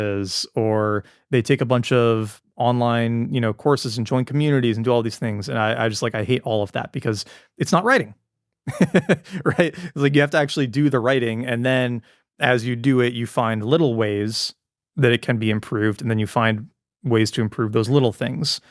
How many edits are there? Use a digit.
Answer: 0